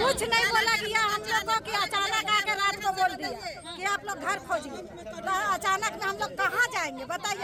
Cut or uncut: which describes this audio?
uncut